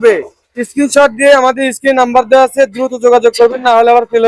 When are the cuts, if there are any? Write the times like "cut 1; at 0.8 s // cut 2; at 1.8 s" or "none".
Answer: none